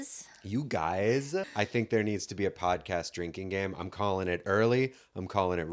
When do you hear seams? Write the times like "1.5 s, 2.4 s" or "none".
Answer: 1.5 s